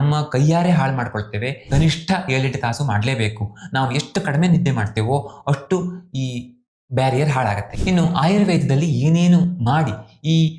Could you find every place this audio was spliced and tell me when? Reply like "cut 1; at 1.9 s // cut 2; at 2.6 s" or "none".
cut 1; at 1.6 s // cut 2; at 7.7 s